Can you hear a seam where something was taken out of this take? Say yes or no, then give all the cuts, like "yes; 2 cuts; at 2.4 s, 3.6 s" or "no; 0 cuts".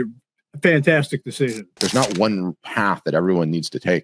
yes; 1 cut; at 1.7 s